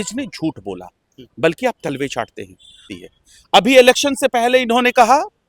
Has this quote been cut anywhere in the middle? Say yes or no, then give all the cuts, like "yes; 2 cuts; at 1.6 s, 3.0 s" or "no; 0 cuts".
yes; 1 cut; at 2.8 s